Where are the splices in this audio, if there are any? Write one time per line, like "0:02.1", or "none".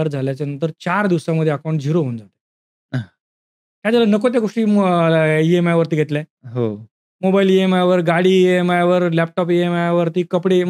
none